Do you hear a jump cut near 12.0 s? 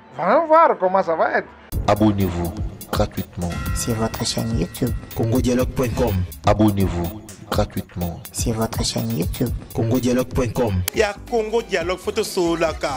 no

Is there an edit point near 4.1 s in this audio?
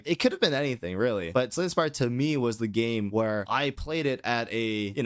no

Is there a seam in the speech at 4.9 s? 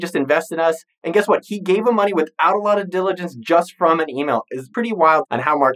yes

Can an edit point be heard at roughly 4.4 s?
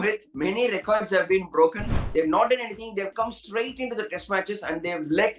no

